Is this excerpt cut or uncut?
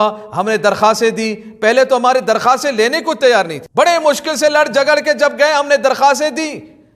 uncut